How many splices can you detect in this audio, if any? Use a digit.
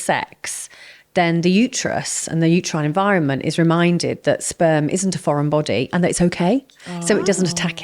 0